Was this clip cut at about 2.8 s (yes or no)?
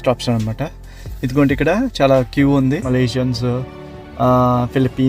yes